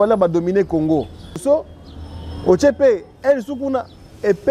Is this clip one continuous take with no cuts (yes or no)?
no